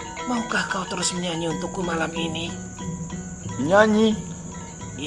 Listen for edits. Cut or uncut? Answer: uncut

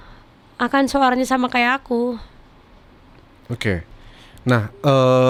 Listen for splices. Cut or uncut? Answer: uncut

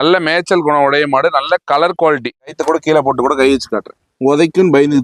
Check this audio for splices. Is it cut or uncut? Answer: cut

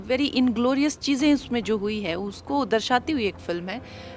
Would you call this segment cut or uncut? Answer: uncut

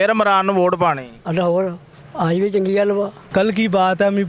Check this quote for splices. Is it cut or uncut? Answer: cut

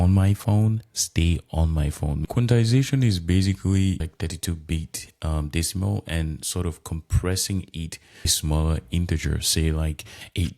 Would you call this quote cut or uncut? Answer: cut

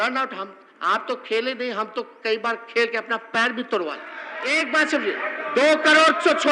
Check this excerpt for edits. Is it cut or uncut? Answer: cut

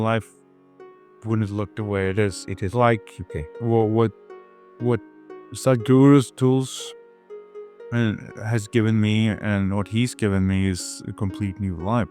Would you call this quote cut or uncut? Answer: uncut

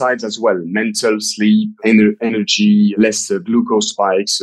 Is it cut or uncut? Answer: cut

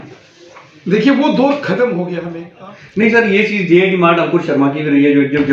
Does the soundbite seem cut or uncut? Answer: cut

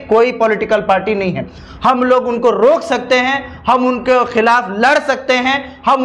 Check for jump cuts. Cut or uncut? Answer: uncut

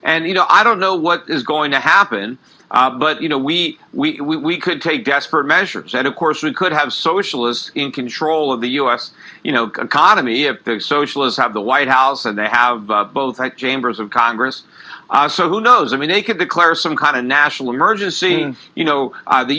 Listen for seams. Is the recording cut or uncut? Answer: uncut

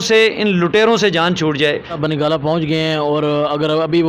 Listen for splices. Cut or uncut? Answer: cut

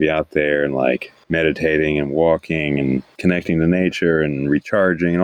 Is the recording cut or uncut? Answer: cut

